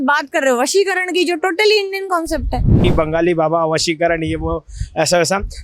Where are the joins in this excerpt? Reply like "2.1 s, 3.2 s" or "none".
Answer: 2.8 s